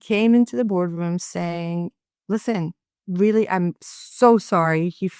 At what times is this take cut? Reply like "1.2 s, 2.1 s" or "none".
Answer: none

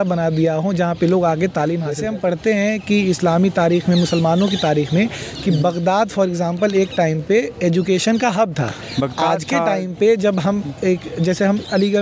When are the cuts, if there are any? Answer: 1.9 s

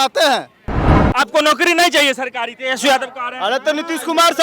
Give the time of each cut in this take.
1.0 s

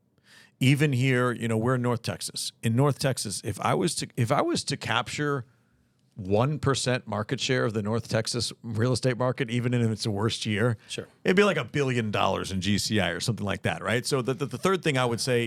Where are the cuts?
none

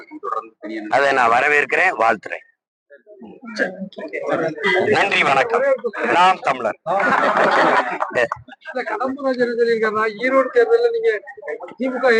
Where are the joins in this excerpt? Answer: none

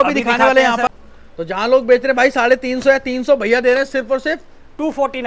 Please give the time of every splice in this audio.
1.0 s

